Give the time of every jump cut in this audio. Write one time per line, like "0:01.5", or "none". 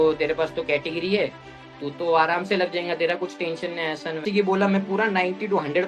0:04.2